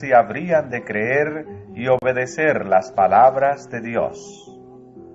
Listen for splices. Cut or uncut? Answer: uncut